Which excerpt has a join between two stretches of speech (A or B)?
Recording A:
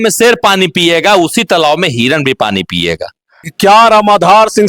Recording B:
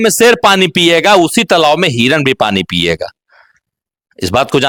A